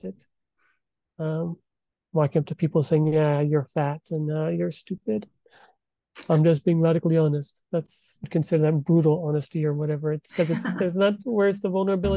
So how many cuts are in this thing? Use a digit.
1